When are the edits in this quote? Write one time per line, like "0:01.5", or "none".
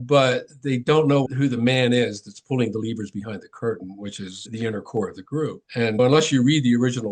0:01.2
0:04.4
0:06.0